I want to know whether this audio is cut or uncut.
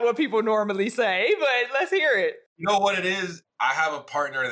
cut